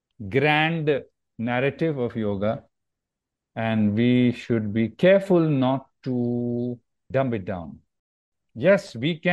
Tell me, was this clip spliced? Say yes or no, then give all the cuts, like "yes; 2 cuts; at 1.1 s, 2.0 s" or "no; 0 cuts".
yes; 2 cuts; at 7.1 s, 8.4 s